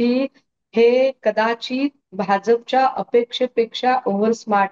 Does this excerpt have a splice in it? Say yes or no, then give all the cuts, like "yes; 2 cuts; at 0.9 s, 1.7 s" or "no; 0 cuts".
no; 0 cuts